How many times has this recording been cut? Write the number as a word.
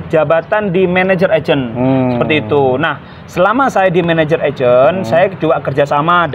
zero